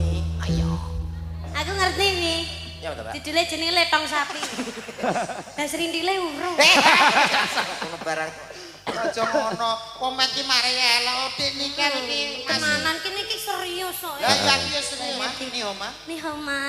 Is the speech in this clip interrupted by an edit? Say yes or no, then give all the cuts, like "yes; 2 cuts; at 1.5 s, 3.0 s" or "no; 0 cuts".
yes; 2 cuts; at 4.4 s, 15.1 s